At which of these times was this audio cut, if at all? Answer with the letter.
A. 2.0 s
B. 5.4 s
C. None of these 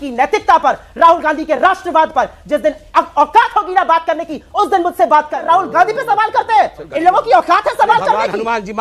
B